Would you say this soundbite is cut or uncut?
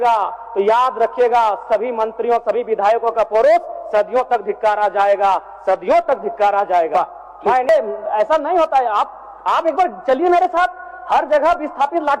cut